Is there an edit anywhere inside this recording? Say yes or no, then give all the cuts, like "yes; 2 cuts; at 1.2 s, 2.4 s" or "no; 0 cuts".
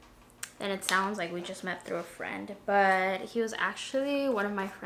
no; 0 cuts